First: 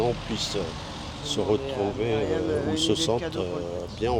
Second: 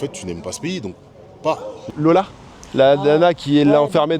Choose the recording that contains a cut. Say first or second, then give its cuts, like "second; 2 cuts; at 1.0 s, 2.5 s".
second; 1 cut; at 1.8 s